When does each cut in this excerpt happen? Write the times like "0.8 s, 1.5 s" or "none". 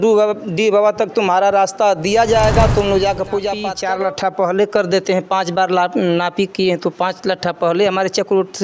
3.7 s